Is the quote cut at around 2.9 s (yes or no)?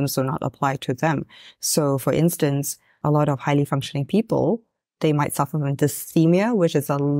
yes